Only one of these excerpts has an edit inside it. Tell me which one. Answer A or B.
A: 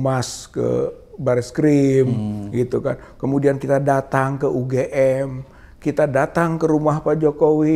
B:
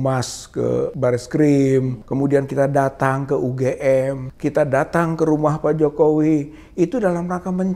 B